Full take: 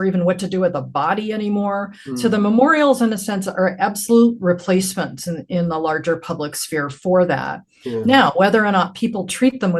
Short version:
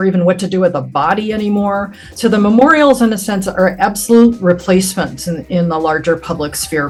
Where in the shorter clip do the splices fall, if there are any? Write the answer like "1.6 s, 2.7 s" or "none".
none